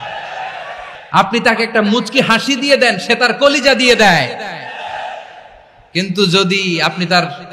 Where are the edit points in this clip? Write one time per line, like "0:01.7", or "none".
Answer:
0:01.0